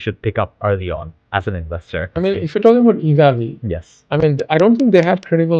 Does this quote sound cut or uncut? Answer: cut